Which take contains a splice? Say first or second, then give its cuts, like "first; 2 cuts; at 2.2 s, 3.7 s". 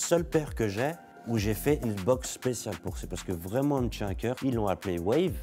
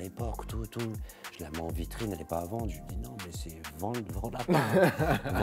first; 2 cuts; at 1.1 s, 4.4 s